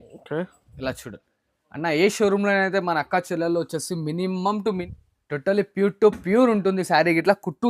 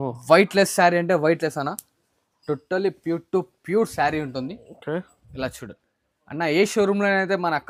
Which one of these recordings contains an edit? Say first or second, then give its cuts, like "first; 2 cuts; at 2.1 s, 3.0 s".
first; 1 cut; at 4.8 s